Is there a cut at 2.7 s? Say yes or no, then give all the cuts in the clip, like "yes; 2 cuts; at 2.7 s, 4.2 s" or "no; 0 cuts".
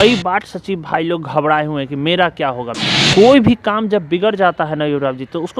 yes; 1 cut; at 2.7 s